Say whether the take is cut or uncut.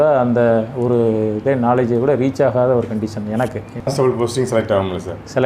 cut